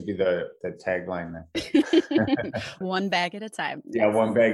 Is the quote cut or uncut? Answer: cut